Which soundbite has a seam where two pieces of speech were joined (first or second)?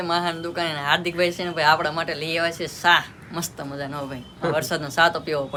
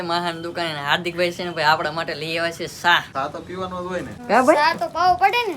second